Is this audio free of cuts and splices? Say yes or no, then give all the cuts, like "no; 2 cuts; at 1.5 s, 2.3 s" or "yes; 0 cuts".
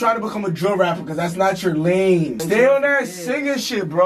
no; 1 cut; at 2.4 s